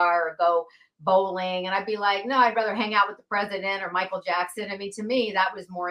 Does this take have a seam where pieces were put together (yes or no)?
no